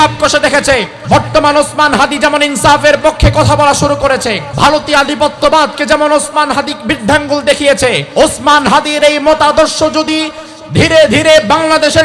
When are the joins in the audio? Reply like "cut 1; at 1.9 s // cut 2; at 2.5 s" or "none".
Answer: cut 1; at 0.9 s // cut 2; at 4.4 s // cut 3; at 8.0 s